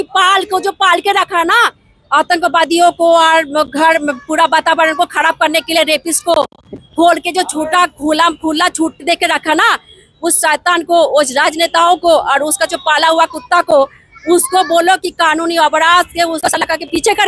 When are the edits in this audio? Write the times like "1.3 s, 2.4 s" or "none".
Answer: 16.4 s